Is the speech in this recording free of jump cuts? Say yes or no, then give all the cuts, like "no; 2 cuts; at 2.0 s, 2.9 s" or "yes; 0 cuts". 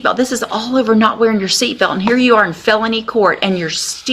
yes; 0 cuts